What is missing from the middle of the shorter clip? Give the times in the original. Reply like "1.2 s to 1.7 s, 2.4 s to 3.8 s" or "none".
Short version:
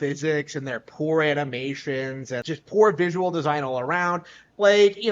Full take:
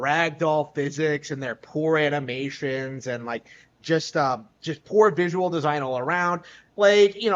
3.1 s to 4.6 s